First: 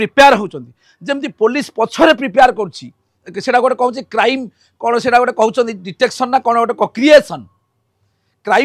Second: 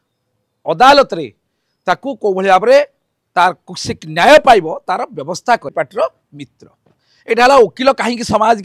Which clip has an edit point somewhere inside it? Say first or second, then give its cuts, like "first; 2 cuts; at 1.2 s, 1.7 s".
second; 1 cut; at 5.7 s